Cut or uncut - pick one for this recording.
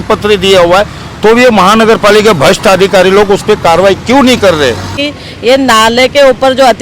cut